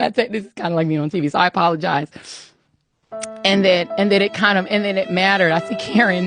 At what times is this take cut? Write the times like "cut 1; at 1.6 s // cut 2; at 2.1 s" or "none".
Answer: none